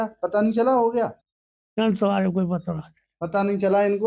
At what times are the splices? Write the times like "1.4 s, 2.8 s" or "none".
1.2 s